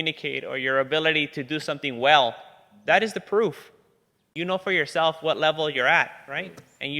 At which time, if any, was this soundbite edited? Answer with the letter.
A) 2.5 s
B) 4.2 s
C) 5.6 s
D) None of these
B